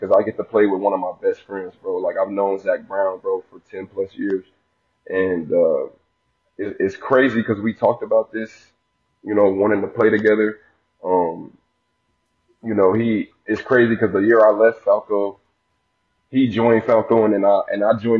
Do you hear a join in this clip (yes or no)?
no